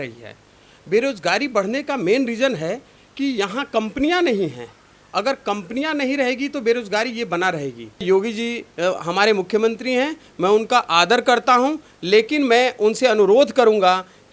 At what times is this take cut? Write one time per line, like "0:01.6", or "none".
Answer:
0:08.0